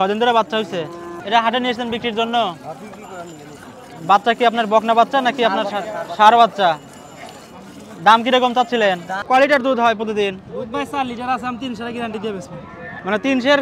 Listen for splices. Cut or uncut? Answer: cut